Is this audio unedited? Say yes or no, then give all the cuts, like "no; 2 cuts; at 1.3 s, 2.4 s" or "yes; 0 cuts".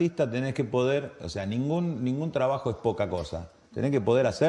yes; 0 cuts